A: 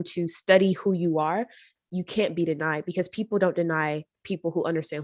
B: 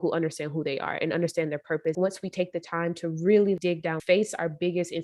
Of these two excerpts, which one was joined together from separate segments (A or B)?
B